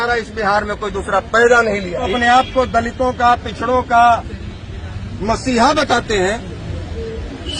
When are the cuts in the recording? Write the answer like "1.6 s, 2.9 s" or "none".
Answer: 2.1 s

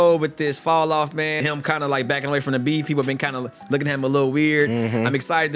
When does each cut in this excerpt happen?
1.4 s

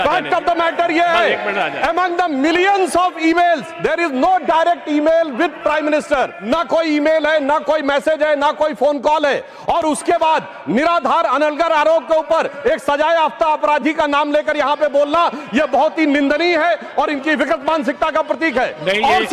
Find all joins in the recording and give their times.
6.4 s

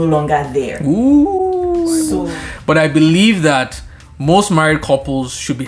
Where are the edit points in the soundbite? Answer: 2.2 s

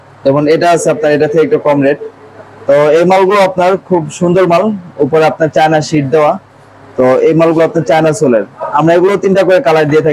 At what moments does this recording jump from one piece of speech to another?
none

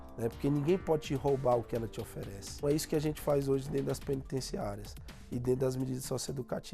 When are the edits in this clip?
2.6 s

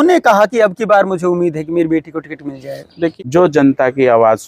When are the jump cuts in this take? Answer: 3.1 s

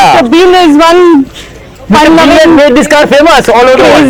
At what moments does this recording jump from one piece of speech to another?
none

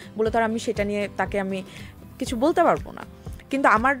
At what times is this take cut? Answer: none

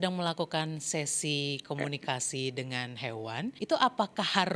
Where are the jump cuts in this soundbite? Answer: 3.6 s

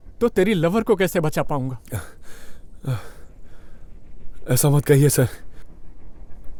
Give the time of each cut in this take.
none

